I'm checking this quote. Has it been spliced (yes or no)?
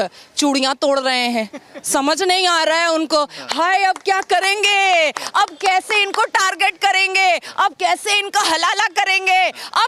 no